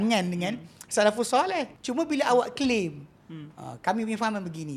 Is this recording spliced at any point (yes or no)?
yes